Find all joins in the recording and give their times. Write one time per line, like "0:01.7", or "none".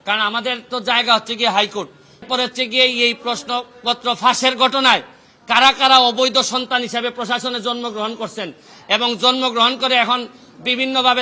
0:02.2